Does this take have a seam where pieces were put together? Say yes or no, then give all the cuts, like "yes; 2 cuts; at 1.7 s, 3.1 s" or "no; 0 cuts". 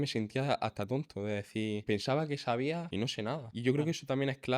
yes; 2 cuts; at 1.8 s, 3.1 s